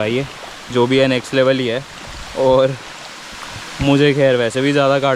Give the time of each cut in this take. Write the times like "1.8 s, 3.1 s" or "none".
none